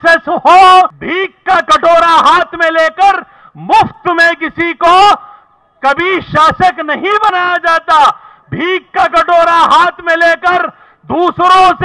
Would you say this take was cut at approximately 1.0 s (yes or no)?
yes